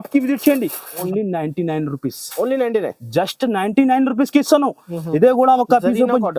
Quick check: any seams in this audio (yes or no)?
yes